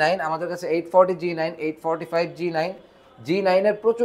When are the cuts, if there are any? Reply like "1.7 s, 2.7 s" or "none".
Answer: none